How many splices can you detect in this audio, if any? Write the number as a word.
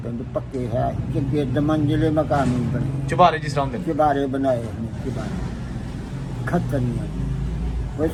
zero